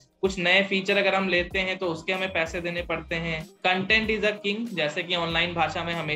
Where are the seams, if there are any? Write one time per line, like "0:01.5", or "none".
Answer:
0:03.5